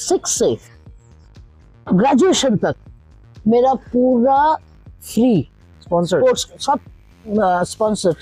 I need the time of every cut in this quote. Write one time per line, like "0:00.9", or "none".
none